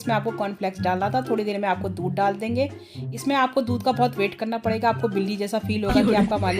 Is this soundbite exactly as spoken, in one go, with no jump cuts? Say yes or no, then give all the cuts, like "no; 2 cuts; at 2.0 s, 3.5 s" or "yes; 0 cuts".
yes; 0 cuts